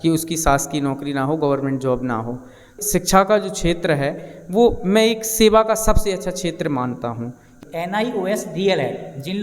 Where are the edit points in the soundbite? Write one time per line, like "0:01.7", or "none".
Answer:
0:02.7
0:07.5